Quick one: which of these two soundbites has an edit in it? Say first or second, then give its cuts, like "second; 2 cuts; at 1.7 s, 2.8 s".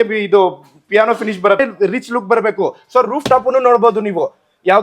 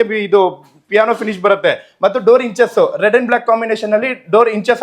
first; 1 cut; at 1.6 s